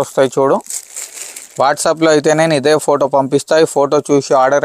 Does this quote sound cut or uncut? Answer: uncut